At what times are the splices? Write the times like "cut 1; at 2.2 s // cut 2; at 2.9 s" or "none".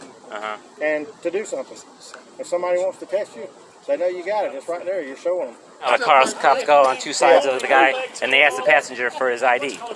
cut 1; at 5.9 s